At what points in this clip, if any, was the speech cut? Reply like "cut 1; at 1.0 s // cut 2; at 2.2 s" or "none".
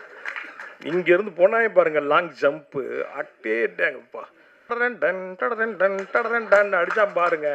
cut 1; at 4.7 s